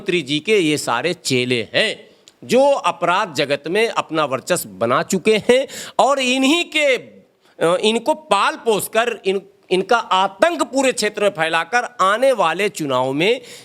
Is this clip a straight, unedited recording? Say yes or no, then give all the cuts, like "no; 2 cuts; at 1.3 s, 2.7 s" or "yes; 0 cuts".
yes; 0 cuts